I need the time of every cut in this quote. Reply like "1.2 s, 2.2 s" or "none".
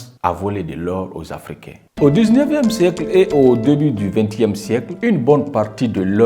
1.8 s